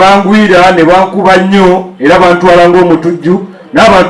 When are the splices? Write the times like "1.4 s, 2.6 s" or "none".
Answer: none